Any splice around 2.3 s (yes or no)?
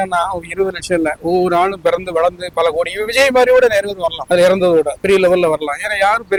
no